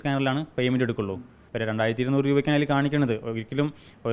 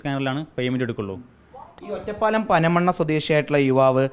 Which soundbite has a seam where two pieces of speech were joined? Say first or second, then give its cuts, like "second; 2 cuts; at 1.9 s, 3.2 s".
first; 1 cut; at 1.4 s